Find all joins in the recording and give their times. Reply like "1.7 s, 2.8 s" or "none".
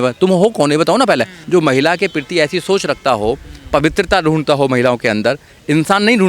1.3 s